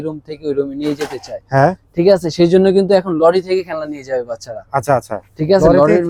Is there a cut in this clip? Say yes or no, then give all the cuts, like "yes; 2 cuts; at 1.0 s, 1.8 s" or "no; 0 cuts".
no; 0 cuts